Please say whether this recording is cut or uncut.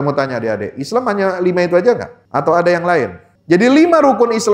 cut